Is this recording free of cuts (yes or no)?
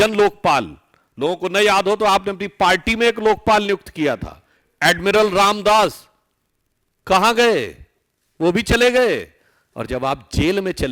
yes